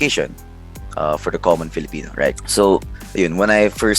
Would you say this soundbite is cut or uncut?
cut